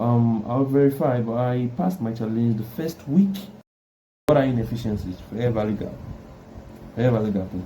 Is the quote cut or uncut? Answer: cut